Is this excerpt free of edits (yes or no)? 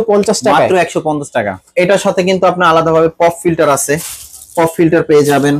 no